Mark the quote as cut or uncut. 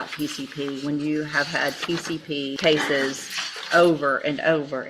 cut